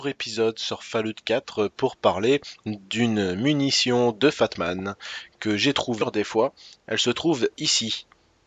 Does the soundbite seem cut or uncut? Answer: uncut